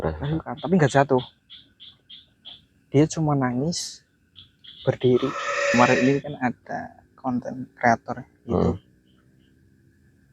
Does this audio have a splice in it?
yes; 1 cut; at 5.7 s

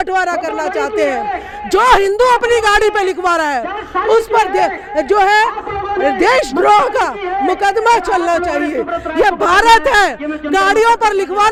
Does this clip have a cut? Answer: no; 0 cuts

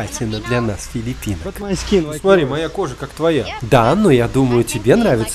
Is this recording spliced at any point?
no; 0 cuts

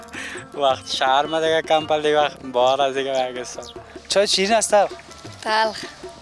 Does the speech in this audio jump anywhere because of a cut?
yes; 1 cut; at 3.9 s

